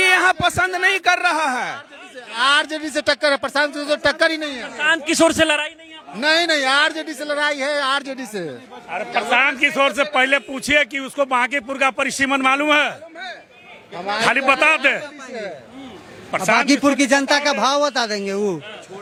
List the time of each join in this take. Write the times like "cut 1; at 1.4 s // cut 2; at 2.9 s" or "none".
none

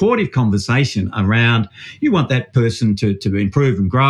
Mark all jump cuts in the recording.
none

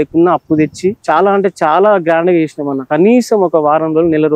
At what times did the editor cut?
cut 1; at 1.0 s // cut 2; at 2.9 s

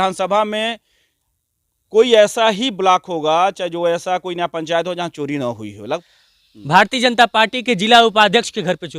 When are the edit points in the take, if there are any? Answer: cut 1; at 6.0 s

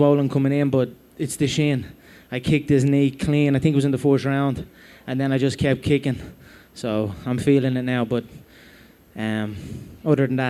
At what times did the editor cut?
none

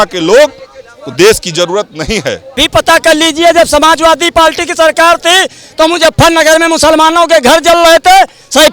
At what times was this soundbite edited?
cut 1; at 2.6 s

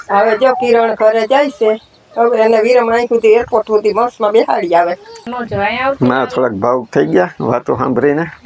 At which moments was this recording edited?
cut 1; at 5.2 s

